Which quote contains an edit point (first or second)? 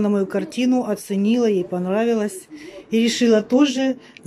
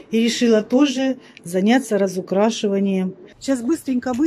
second